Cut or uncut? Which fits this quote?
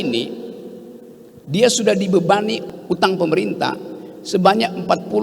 cut